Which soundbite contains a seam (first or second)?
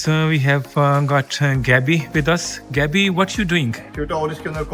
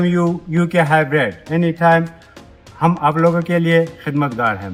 first